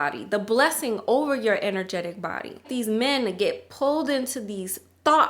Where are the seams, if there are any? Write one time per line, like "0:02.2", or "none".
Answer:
0:02.7